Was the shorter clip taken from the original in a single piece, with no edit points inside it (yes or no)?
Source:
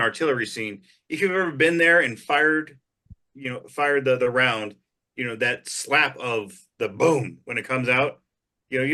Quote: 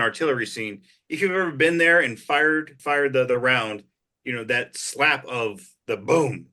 no